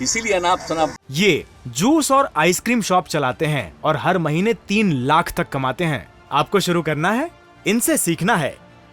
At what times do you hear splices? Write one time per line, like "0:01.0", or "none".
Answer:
0:01.0